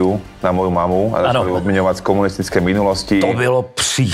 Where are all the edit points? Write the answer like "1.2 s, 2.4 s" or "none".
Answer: none